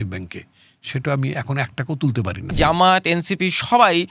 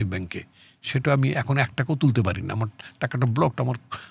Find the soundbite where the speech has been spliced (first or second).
first